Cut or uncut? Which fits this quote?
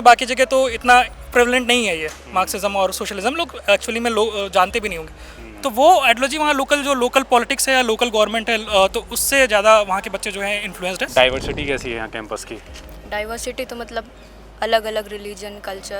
cut